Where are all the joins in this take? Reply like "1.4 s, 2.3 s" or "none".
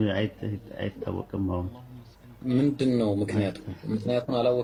none